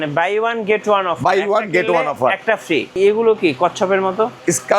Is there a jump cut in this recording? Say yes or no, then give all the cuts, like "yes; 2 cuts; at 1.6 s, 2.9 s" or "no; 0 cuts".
yes; 1 cut; at 3.0 s